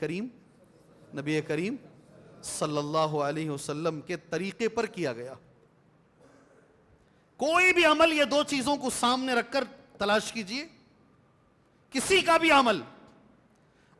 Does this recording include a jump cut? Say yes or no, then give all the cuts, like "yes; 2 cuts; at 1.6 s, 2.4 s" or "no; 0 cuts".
no; 0 cuts